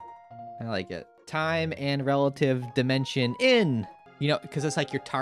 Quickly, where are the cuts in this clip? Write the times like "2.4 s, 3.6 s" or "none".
1.2 s, 4.0 s